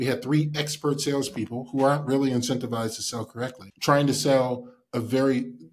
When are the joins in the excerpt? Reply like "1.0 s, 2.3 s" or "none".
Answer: 3.7 s